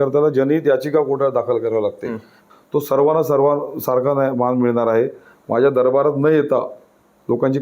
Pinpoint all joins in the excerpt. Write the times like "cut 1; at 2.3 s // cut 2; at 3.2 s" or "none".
cut 1; at 2.4 s